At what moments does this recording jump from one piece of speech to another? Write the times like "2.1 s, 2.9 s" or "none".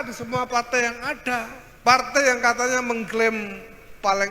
1.6 s